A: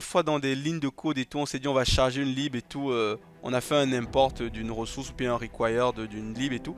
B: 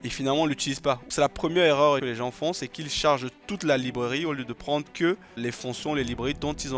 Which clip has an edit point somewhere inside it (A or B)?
B